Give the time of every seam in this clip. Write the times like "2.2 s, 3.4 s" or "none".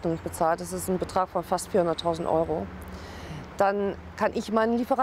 none